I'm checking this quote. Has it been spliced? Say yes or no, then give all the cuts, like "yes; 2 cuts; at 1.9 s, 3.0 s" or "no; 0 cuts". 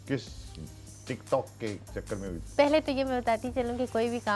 no; 0 cuts